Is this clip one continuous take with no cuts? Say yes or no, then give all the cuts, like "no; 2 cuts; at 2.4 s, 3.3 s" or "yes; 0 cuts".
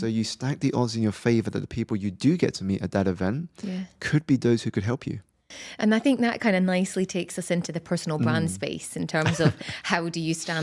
yes; 0 cuts